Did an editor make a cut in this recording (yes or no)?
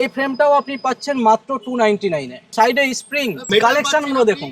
yes